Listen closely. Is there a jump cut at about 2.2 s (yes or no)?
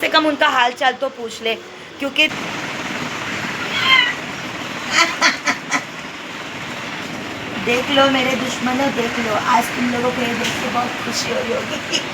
yes